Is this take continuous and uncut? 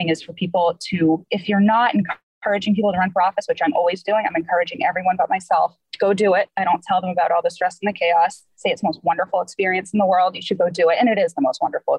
no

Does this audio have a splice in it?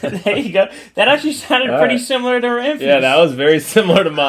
no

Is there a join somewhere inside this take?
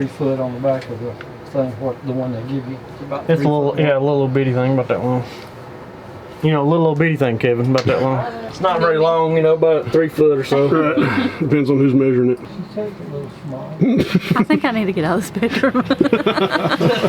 no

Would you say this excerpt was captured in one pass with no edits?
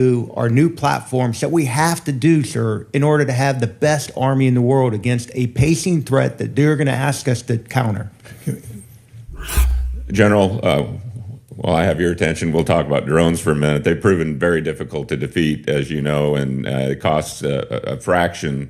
no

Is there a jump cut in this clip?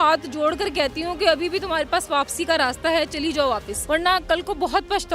yes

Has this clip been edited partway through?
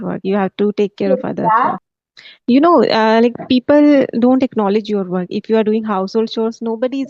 yes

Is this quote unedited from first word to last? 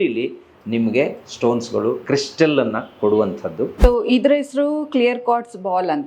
no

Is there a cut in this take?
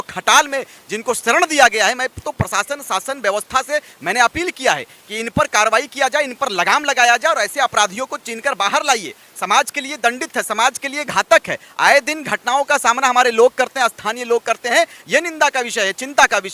no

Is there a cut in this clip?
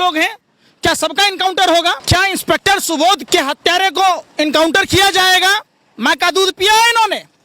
yes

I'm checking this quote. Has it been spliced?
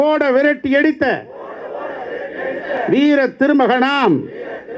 yes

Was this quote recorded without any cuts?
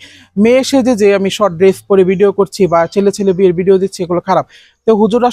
yes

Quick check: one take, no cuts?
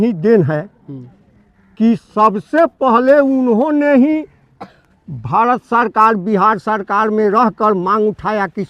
yes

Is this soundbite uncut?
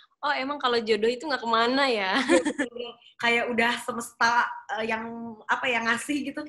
yes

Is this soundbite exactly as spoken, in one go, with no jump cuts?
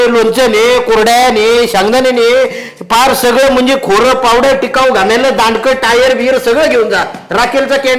yes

